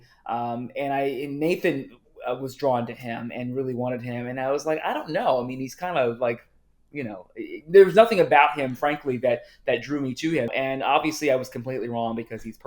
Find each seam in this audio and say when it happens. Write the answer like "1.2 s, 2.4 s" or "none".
10.5 s